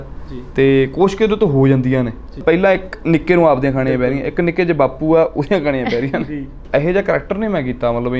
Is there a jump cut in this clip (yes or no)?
yes